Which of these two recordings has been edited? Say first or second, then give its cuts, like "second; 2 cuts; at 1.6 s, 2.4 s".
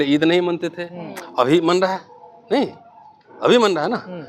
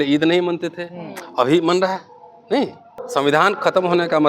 second; 1 cut; at 2.9 s